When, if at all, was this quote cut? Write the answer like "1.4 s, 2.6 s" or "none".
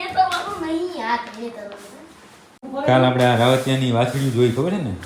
2.7 s